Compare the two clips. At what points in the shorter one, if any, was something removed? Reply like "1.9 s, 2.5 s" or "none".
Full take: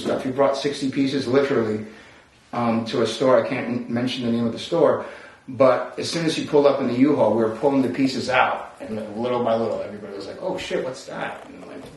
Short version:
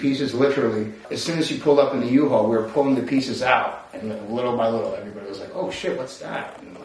1.1 s